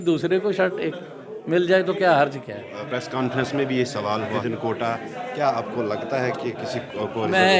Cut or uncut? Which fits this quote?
cut